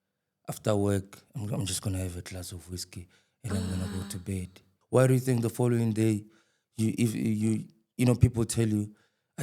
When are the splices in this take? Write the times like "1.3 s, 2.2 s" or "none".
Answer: 4.7 s

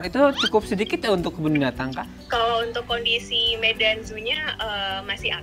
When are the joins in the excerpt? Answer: 2.2 s

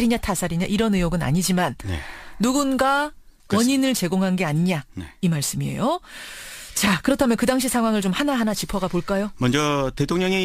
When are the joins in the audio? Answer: 3.0 s

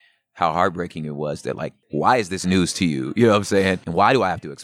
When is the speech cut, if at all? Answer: 1.8 s

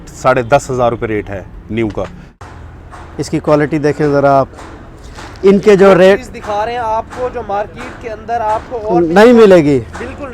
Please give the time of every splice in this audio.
2.4 s

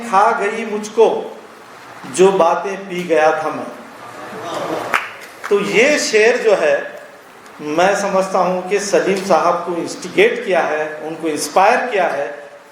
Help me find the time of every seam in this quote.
none

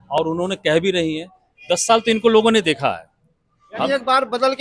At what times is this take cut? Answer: none

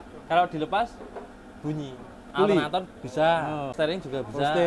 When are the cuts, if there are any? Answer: 2.2 s, 3.7 s

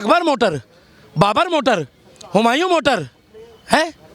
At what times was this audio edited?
none

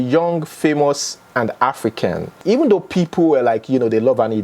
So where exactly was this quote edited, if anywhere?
2.3 s

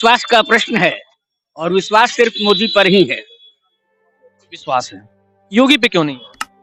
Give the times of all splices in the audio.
none

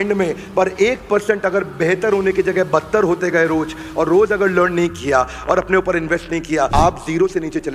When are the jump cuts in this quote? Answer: 6.7 s

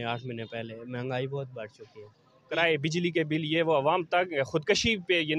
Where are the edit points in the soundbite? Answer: 2.5 s

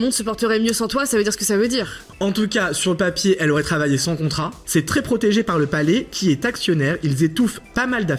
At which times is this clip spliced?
2.0 s, 4.6 s

